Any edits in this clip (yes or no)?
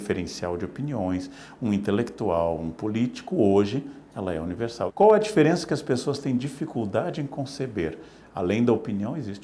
yes